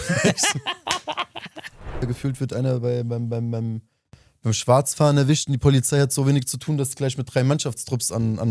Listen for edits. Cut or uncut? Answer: cut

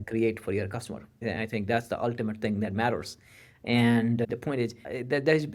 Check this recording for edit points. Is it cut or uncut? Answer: uncut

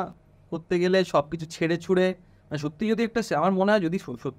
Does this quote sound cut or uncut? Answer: uncut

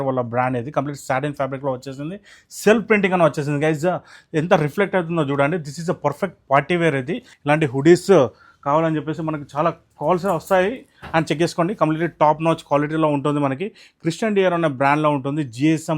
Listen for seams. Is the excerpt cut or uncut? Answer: cut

